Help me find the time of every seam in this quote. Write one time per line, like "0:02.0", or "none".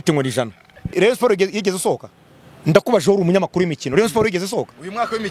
0:00.9